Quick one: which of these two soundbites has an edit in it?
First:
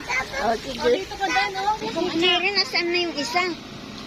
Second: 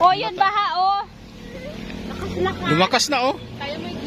first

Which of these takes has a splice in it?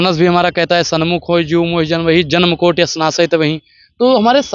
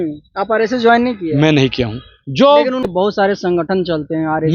second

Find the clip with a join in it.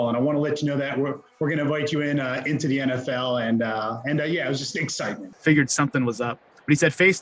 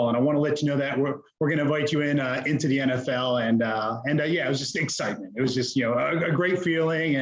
first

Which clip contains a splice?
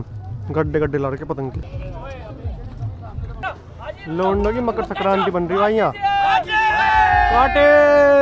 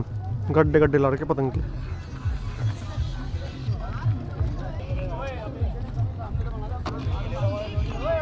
first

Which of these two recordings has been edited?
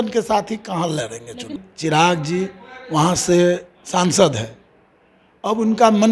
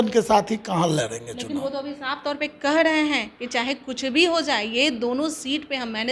first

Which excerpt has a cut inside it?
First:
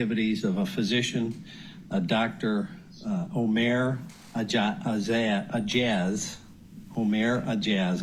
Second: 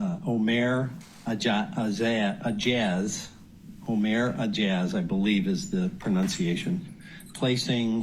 second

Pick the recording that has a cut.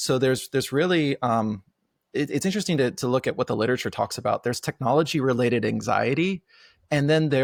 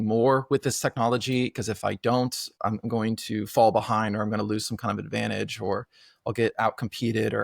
second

